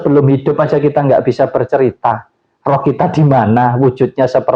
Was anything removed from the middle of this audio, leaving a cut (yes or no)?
no